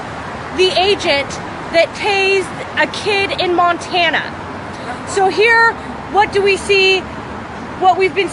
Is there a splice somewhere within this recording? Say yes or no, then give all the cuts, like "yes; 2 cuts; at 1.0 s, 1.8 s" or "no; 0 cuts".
no; 0 cuts